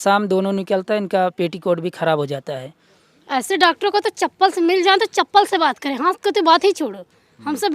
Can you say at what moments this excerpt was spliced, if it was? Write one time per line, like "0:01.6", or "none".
0:02.6